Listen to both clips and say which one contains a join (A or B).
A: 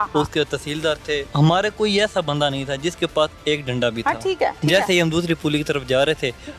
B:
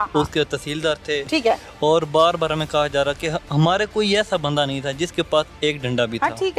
A